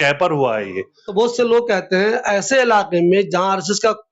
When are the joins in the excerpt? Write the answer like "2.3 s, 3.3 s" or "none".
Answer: 1.0 s

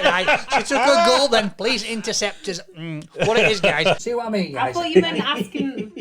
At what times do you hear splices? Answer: 4.0 s

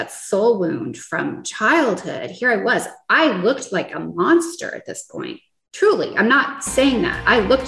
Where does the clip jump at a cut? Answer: none

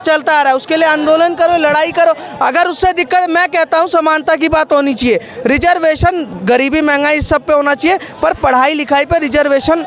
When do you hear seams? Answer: none

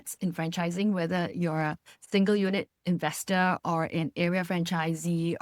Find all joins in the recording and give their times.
none

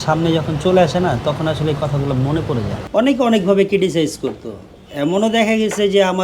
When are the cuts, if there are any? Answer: 2.8 s

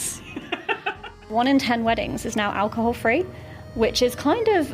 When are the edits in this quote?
1.2 s

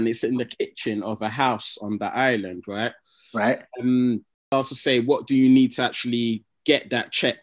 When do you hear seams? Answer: 4.5 s

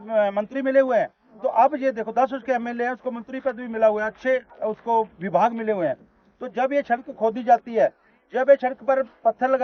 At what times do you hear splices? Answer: none

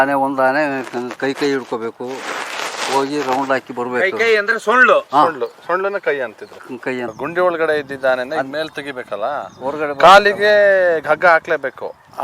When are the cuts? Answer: 7.1 s

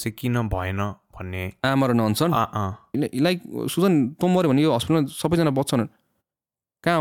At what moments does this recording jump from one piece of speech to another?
2.9 s

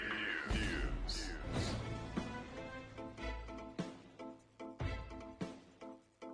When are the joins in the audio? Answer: none

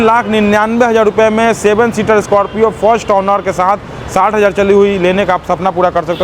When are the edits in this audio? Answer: none

